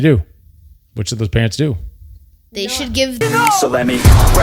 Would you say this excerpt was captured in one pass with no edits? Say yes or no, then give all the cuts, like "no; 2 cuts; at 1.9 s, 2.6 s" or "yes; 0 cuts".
no; 1 cut; at 3.2 s